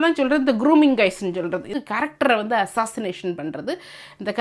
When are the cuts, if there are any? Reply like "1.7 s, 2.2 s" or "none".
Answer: 1.7 s